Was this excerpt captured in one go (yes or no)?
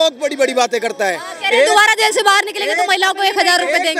yes